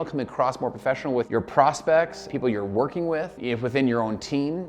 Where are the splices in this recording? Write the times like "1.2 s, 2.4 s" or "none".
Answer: 2.2 s, 3.4 s

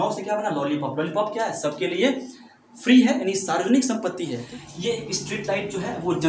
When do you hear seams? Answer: 4.4 s

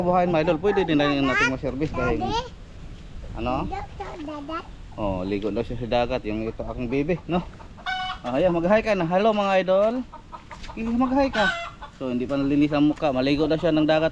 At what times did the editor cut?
none

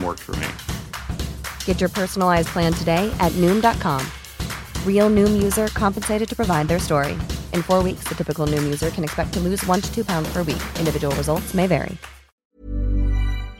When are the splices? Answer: 12.4 s

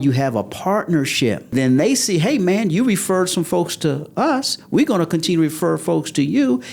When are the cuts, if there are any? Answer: 1.5 s

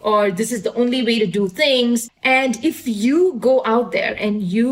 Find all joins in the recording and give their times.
2.1 s

